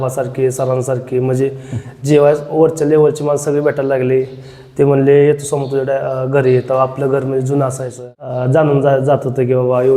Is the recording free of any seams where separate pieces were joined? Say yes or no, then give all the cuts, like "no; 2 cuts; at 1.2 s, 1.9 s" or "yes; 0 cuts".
no; 1 cut; at 8.4 s